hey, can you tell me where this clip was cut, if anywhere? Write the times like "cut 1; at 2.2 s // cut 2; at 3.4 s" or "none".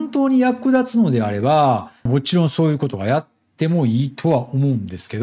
none